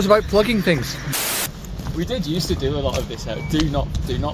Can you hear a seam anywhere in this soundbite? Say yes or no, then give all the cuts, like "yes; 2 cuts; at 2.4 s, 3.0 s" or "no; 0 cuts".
yes; 1 cut; at 1.5 s